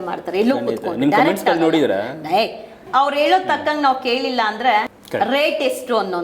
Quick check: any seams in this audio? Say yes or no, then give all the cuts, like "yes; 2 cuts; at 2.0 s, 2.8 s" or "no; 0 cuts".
yes; 2 cuts; at 2.8 s, 5.0 s